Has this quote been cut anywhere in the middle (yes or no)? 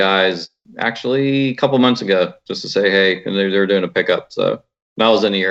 no